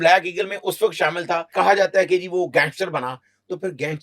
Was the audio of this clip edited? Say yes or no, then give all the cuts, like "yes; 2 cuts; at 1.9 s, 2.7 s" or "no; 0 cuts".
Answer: yes; 1 cut; at 1.5 s